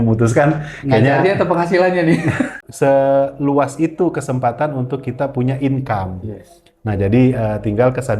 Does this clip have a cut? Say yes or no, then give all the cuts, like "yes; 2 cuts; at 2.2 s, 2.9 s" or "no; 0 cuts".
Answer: yes; 1 cut; at 2.6 s